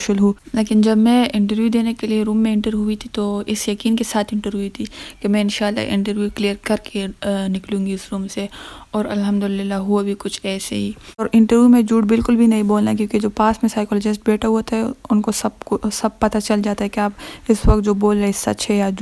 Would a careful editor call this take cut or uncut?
cut